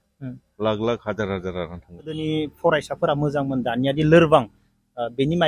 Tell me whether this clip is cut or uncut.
cut